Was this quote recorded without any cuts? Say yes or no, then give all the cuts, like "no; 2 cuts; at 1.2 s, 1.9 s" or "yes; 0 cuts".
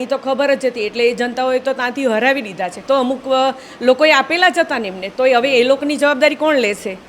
no; 1 cut; at 2.8 s